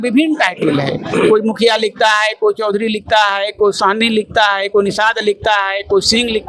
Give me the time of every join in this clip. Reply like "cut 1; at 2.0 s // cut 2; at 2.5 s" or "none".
none